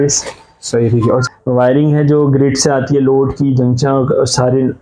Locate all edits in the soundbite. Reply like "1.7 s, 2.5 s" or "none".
1.2 s